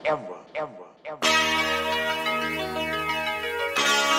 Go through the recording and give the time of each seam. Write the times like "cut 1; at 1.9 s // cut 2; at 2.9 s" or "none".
cut 1; at 1.1 s